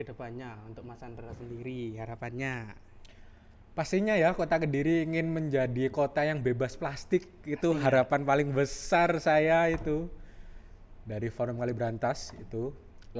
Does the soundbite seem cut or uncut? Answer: uncut